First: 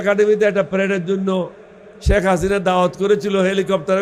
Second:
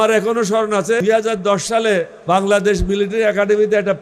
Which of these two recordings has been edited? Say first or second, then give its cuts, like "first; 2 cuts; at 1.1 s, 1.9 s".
second; 2 cuts; at 1.0 s, 2.1 s